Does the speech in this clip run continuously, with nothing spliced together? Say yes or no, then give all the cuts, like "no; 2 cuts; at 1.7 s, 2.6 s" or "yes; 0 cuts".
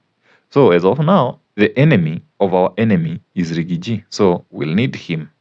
no; 2 cuts; at 1.4 s, 2.2 s